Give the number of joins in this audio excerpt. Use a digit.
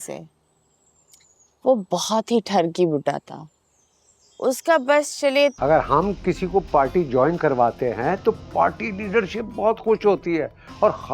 1